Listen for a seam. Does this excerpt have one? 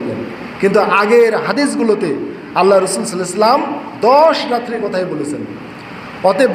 no; 0 cuts

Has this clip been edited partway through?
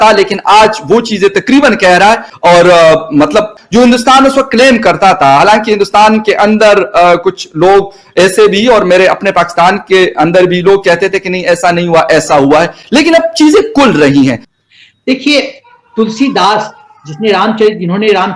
yes; 3 cuts; at 2.3 s, 3.6 s, 14.5 s

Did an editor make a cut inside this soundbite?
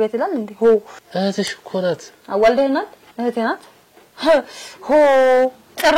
yes; 3 cuts; at 1.0 s, 2.1 s, 3.0 s

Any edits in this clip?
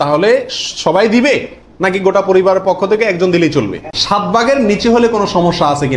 yes; 1 cut; at 4.0 s

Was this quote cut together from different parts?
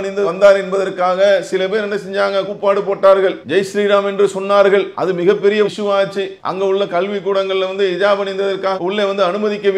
yes; 3 cuts; at 3.4 s, 4.9 s, 6.4 s

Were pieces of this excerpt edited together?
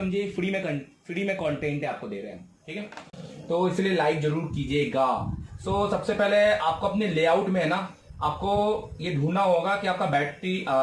no; 0 cuts

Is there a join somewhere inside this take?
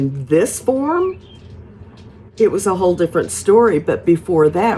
no; 0 cuts

